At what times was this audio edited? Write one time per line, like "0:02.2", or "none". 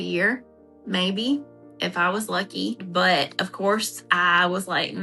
0:02.8